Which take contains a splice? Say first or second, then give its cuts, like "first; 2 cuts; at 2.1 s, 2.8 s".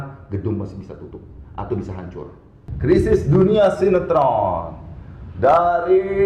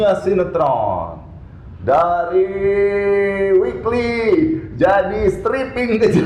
first; 1 cut; at 2.6 s